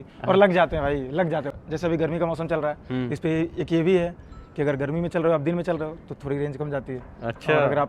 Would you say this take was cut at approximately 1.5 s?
yes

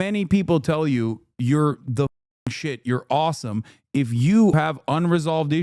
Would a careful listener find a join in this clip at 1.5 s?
no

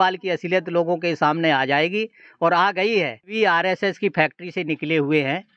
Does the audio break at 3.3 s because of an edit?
yes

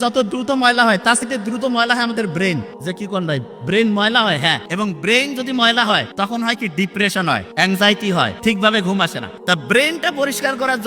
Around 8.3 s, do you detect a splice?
yes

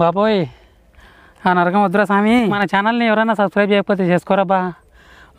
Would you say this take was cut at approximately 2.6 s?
yes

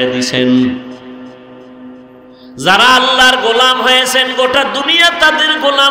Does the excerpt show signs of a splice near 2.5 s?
yes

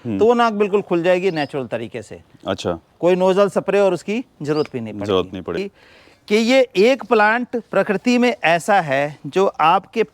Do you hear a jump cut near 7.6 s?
no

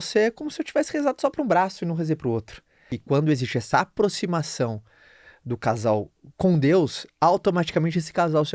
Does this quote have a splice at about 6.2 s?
yes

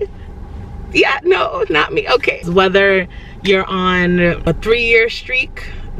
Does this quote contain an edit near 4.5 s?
yes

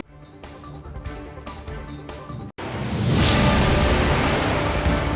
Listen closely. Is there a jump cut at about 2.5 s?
yes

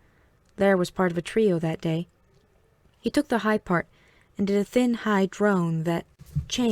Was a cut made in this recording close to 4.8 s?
no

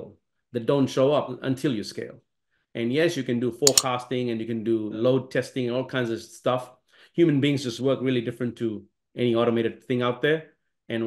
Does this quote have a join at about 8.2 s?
no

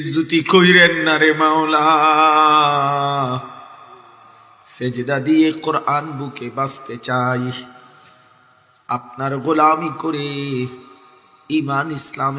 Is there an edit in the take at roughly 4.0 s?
no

